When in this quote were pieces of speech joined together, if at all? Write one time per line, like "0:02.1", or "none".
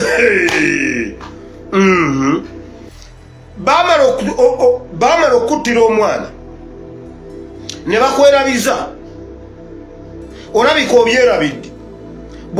0:08.9
0:10.5